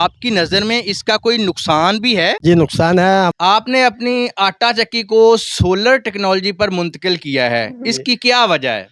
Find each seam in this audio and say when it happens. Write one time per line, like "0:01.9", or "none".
0:03.3